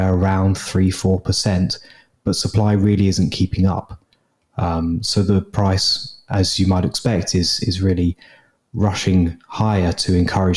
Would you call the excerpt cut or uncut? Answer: uncut